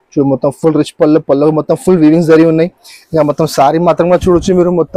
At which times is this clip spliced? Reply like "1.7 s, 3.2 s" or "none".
none